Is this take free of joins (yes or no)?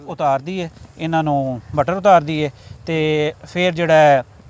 yes